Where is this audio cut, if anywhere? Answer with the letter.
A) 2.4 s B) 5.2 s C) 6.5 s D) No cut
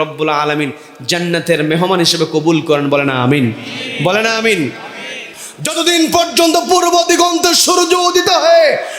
B